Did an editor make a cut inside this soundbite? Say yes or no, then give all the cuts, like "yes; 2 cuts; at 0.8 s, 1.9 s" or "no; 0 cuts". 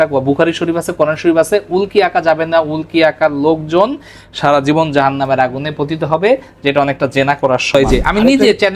yes; 1 cut; at 7.7 s